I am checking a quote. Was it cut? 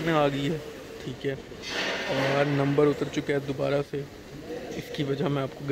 no; 0 cuts

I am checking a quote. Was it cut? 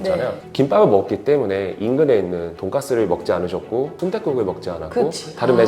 yes; 2 cuts; at 2.5 s, 3.9 s

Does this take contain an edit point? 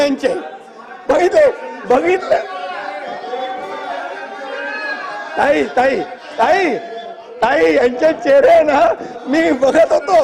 no; 0 cuts

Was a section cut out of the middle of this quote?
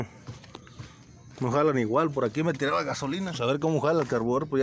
yes; 1 cut; at 3.1 s

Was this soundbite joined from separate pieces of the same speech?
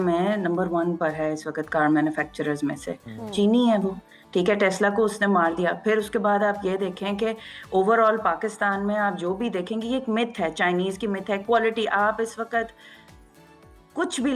no; 0 cuts

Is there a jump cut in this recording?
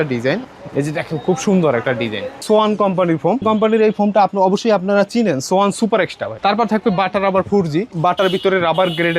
yes; 4 cuts; at 2.4 s, 3.4 s, 6.3 s, 7.9 s

